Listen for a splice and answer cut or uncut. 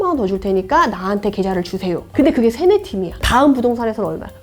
cut